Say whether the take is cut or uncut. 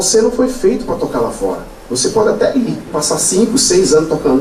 uncut